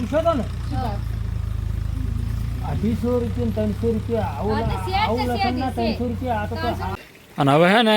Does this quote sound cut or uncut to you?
cut